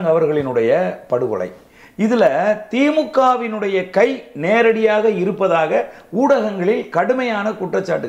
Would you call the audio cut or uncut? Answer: uncut